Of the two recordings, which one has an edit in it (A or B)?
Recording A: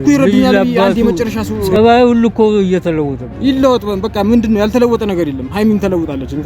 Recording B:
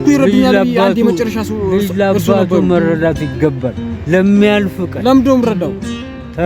A